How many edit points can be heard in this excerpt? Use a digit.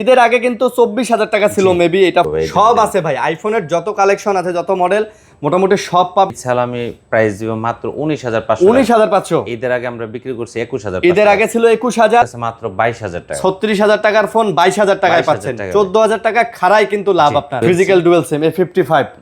4